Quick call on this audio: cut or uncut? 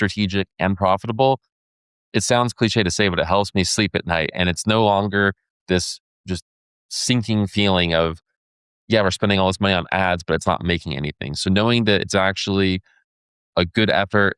uncut